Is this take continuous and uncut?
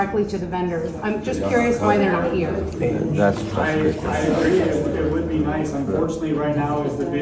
yes; 0 cuts

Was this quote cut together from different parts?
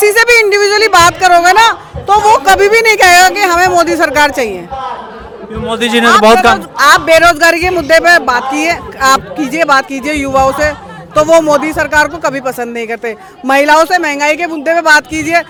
no; 0 cuts

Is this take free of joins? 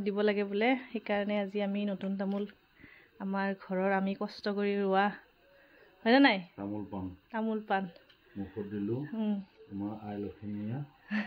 yes; 0 cuts

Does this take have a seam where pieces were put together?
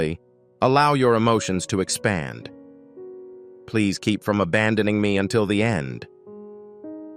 yes; 2 cuts; at 2.5 s, 3.7 s

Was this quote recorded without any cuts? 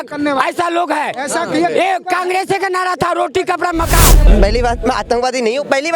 no; 1 cut; at 4.2 s

